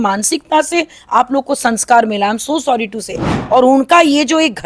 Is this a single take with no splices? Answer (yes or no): no